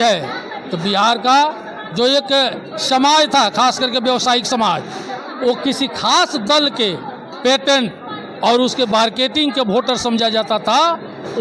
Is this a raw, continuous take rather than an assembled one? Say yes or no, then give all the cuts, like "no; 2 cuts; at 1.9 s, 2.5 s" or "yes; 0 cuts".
yes; 0 cuts